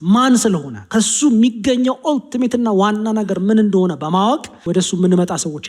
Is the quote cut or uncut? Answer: cut